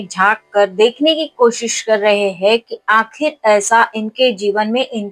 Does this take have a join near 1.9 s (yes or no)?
no